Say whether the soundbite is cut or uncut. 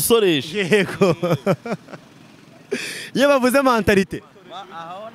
uncut